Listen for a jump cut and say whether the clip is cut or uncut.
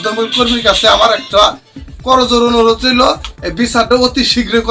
uncut